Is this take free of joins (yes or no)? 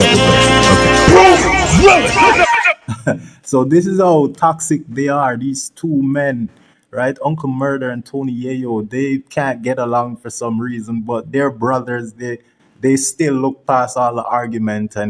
yes